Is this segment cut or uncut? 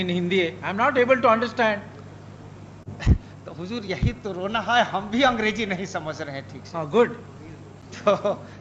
uncut